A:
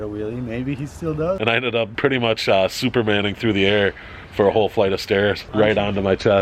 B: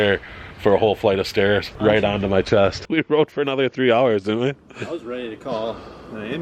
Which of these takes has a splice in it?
A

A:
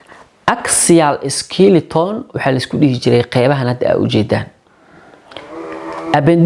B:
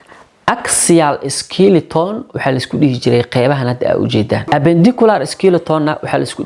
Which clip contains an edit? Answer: B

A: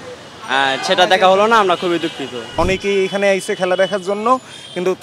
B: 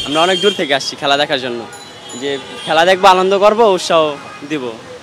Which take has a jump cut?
A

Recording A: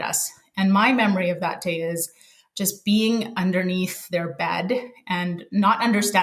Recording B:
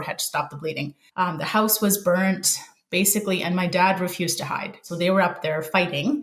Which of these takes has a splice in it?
B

